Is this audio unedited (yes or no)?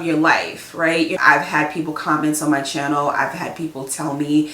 no